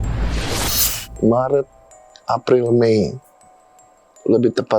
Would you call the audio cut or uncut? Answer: cut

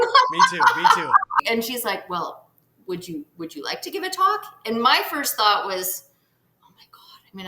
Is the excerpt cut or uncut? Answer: cut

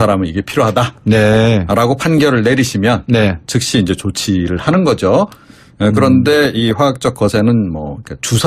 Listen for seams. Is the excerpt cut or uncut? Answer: cut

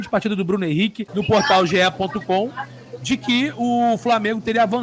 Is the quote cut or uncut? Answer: cut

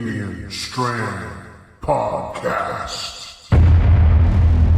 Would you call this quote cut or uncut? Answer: uncut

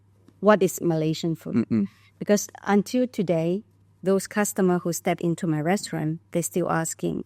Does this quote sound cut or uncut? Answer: uncut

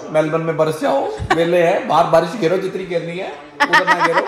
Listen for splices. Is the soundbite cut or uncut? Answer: uncut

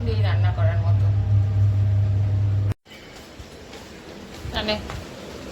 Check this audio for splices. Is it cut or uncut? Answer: uncut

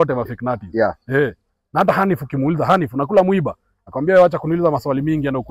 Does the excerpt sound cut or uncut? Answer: uncut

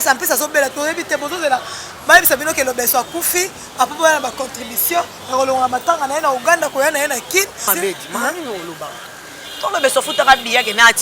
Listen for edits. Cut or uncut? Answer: cut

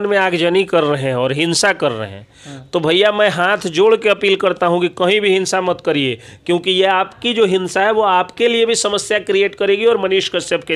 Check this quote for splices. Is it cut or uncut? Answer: uncut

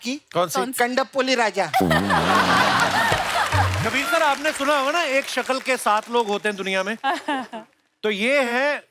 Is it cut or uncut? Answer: cut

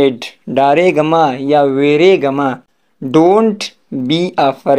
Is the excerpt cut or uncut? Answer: uncut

